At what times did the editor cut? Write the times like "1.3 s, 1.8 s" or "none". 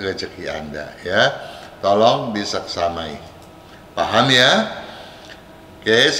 none